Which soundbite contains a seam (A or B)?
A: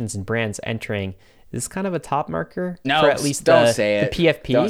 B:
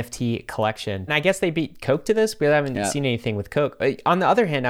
B